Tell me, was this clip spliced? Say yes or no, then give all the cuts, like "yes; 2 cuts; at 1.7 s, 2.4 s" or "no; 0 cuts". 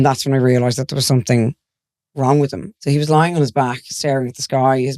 yes; 1 cut; at 2.7 s